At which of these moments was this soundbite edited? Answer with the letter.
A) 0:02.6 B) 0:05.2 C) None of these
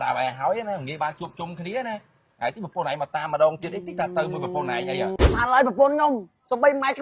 B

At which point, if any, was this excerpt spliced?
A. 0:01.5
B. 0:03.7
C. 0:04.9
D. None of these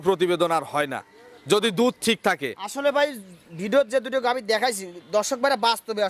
D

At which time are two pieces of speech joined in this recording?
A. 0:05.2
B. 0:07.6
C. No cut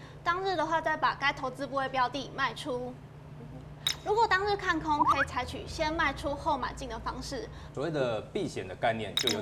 B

